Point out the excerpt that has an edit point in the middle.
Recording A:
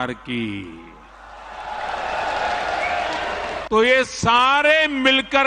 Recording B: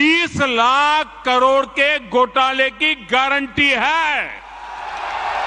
A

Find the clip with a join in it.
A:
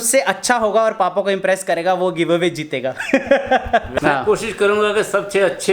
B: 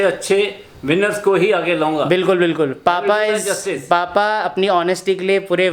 A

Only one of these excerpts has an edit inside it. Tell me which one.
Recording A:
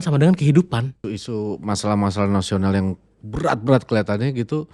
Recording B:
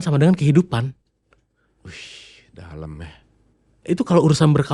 A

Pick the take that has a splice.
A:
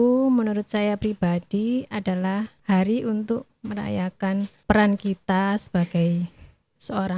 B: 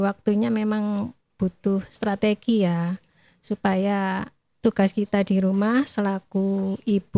A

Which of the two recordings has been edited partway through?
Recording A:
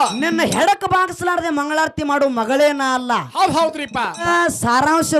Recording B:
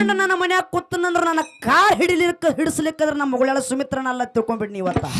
A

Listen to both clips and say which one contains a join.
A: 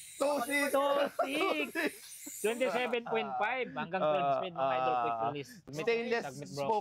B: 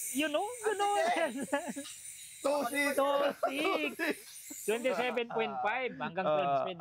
A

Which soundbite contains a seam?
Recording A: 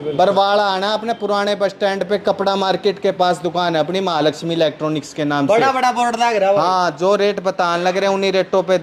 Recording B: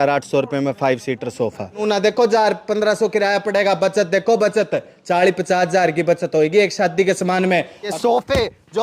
B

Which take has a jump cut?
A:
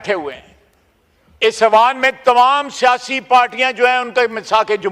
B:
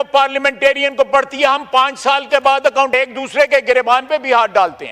B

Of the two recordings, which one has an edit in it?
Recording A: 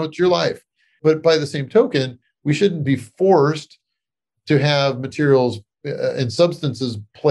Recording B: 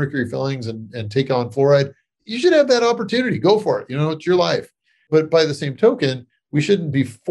B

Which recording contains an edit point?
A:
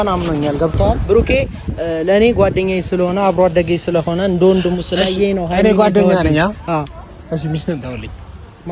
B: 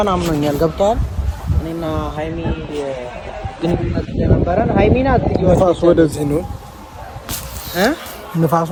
A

